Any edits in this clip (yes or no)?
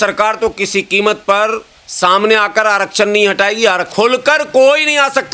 yes